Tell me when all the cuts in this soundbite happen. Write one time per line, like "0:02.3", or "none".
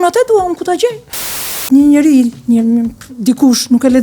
0:01.1